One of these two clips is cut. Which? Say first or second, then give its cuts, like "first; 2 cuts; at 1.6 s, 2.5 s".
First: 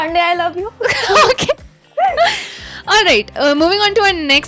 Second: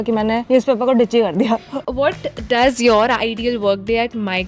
second; 1 cut; at 1.8 s